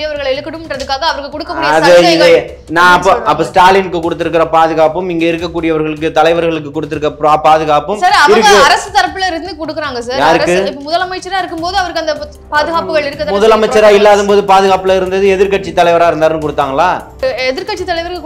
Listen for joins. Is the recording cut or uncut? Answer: cut